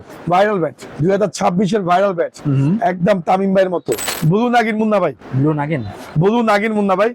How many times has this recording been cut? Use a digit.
1